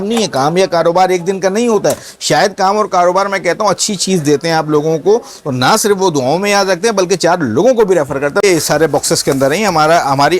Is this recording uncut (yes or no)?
no